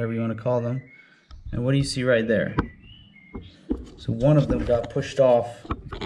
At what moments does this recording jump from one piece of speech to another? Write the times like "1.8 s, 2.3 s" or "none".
none